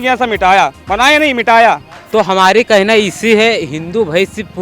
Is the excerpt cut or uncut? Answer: cut